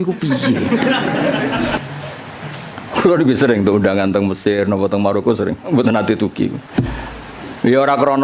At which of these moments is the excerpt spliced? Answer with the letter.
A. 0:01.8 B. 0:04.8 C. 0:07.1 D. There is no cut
A